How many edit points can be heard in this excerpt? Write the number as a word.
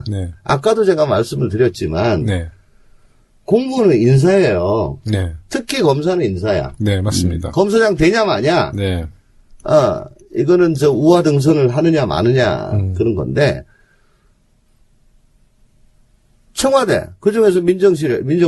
zero